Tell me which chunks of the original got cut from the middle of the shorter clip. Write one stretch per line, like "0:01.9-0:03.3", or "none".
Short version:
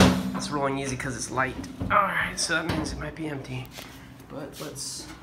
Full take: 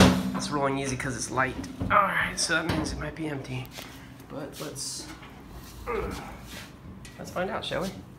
none